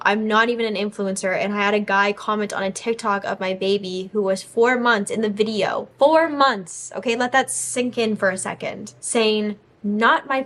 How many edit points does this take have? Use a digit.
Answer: 0